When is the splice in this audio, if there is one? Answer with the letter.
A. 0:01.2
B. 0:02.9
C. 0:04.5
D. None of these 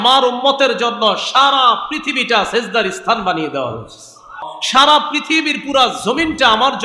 C